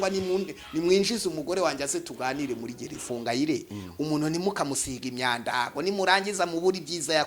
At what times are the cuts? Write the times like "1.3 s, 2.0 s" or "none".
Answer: 3.1 s